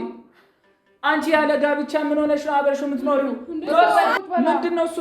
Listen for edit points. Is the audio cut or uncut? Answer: cut